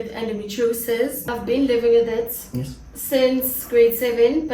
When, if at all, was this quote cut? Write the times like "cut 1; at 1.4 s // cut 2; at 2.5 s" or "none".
cut 1; at 1.3 s